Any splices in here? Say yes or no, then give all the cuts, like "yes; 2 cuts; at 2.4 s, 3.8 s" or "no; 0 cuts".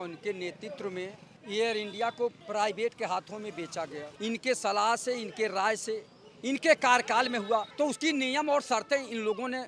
yes; 4 cuts; at 1.3 s, 2.4 s, 4.0 s, 7.7 s